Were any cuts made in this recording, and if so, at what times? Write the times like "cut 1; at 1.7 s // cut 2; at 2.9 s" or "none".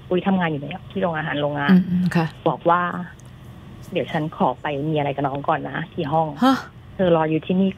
none